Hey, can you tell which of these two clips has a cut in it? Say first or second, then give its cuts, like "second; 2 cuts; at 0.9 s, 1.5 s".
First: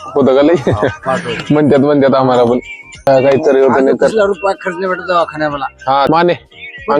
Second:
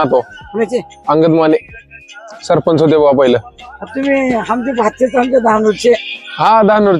first; 2 cuts; at 3.1 s, 6.1 s